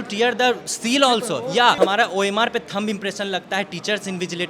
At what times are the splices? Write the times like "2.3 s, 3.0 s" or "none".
1.8 s